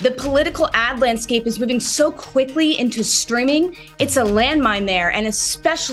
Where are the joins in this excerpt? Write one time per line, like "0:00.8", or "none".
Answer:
none